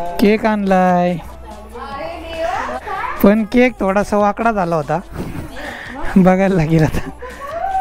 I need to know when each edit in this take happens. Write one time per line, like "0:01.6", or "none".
0:02.7

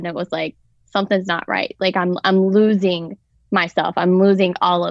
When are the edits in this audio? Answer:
none

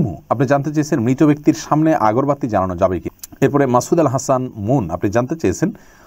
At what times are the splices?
0:03.1

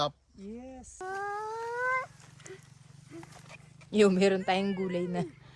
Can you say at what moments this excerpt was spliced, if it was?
0:01.0

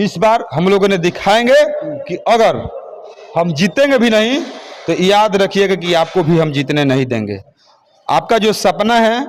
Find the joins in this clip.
none

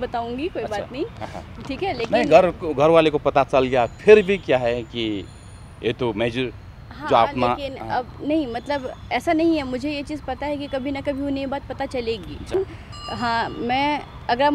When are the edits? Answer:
0:12.5

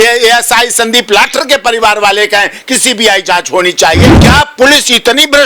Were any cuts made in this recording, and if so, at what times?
0:04.1

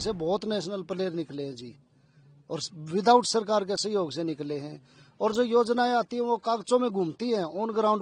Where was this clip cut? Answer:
none

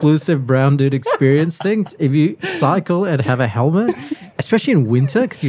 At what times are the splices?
0:01.9

